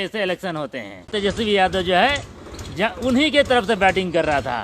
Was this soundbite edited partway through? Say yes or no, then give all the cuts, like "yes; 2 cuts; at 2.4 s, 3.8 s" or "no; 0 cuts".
yes; 1 cut; at 1.1 s